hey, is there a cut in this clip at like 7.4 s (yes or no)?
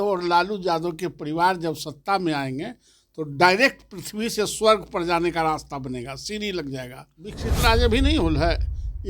yes